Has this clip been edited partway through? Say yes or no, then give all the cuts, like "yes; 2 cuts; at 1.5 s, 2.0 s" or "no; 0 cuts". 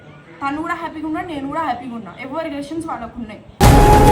yes; 1 cut; at 3.0 s